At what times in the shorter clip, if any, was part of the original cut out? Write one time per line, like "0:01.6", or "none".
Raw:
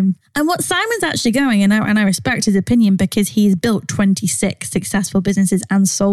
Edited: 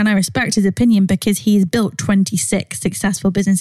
none

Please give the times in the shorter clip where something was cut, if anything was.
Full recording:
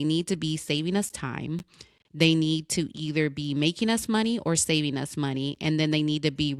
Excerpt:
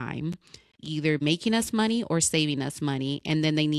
0:00.9

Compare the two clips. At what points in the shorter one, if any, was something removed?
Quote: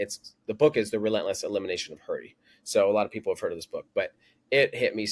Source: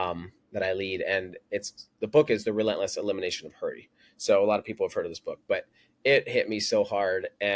none

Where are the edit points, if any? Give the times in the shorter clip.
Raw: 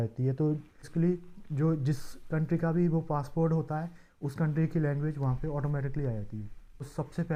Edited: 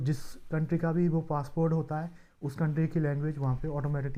none

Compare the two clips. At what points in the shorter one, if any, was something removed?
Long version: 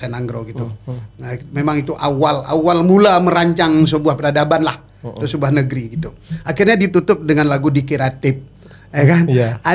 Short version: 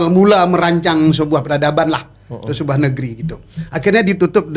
none

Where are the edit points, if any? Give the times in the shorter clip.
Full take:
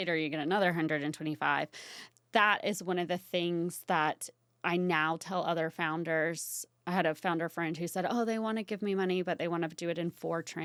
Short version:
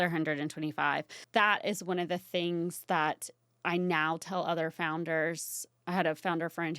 0:01.1

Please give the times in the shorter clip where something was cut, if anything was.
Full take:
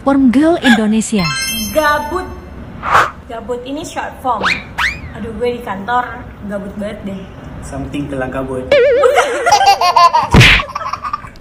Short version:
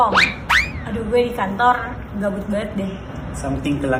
none

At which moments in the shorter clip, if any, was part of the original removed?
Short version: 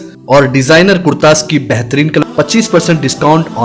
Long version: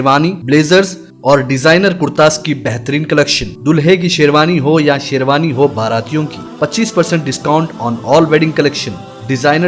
0:02.2

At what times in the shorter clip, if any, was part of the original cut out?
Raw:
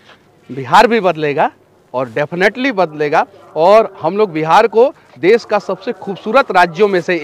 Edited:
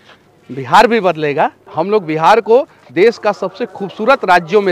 0:01.7

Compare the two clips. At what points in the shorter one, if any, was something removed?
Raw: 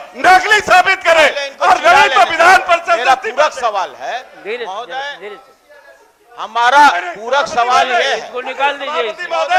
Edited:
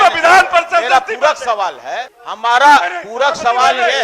0:02.1

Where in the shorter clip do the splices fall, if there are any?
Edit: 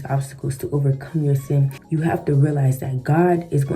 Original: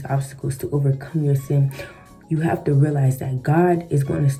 0:01.8

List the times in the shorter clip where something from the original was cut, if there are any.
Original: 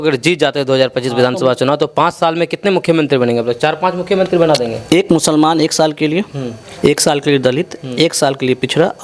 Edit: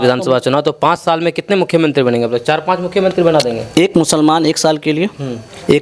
none

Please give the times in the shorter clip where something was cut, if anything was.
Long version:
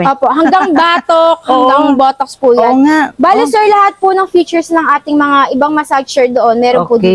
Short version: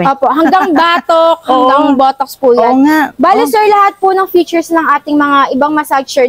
none

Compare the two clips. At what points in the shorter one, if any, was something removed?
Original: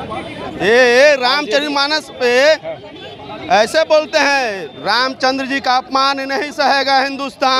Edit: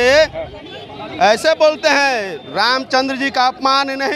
none

